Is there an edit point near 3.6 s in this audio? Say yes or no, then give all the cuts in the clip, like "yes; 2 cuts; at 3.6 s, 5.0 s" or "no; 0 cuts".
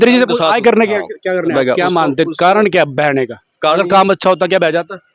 no; 1 cut; at 1.5 s